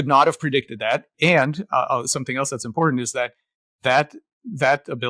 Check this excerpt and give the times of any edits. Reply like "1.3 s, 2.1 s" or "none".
none